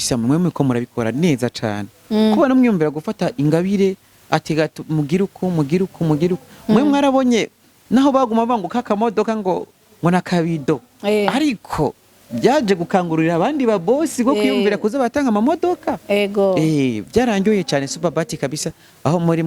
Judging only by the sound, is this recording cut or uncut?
uncut